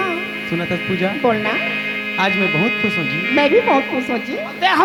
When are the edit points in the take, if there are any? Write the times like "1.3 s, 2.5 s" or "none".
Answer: none